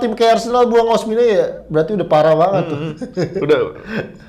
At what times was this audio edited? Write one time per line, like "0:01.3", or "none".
none